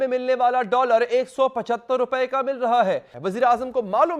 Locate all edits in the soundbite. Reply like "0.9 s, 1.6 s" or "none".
3.1 s